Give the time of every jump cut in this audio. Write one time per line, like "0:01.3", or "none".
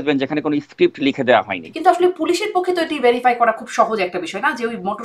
0:01.6